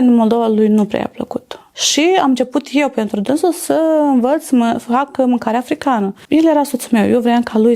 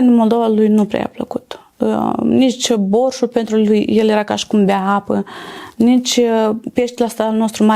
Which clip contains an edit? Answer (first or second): first